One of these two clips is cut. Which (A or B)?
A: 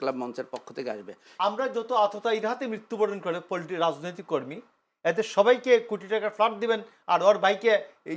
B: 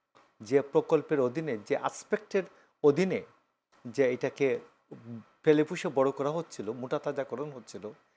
A